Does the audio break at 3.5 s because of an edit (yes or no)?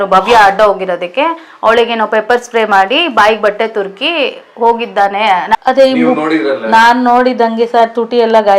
no